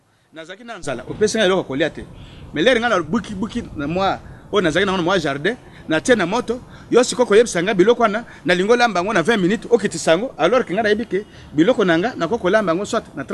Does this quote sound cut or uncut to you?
uncut